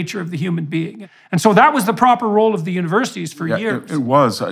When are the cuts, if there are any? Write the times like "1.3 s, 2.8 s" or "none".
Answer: 1.0 s